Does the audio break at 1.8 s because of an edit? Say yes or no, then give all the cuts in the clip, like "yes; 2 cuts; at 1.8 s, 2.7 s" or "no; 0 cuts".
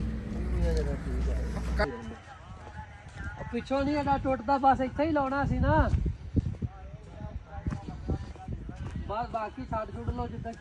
yes; 1 cut; at 1.8 s